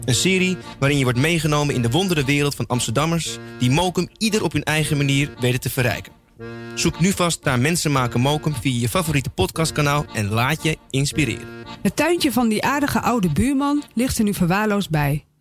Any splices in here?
yes; 1 cut; at 11.7 s

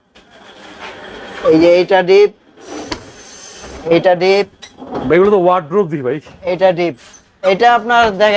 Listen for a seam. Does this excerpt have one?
no; 0 cuts

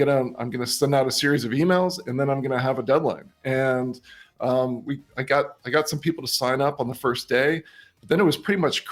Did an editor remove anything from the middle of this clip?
no; 0 cuts

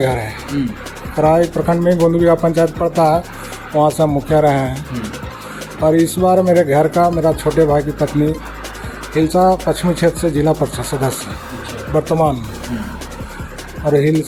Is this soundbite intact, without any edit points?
yes; 0 cuts

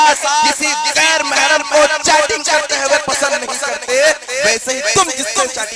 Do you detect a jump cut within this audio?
no; 0 cuts

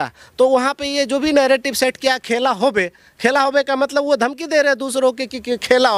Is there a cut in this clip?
no; 0 cuts

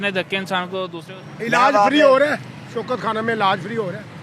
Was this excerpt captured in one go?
no; 1 cut; at 1.0 s

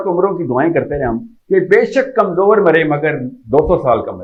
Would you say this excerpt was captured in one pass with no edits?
yes; 0 cuts

